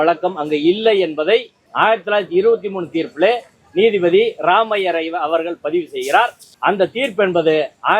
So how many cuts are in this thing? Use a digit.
2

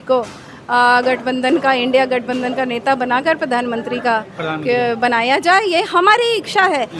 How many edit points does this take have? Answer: 0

